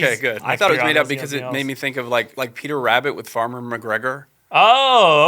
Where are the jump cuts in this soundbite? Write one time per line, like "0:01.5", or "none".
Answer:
0:00.7
0:02.3